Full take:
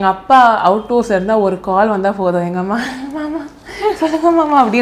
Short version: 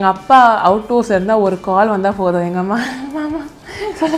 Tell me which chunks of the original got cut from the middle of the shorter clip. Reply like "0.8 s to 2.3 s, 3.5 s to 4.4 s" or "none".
none